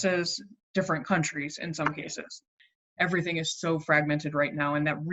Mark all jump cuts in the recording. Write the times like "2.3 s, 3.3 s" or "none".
2.5 s